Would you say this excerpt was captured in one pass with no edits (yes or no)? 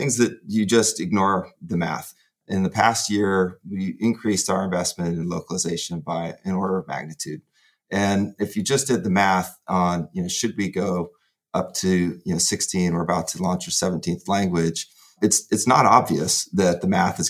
no